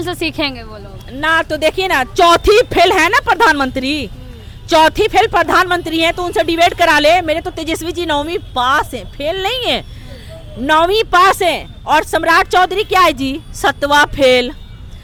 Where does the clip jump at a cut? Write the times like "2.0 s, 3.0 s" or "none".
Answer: none